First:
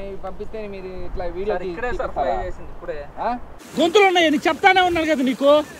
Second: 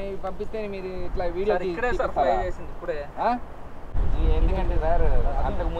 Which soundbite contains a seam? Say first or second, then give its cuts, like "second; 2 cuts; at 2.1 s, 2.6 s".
first; 1 cut; at 3.6 s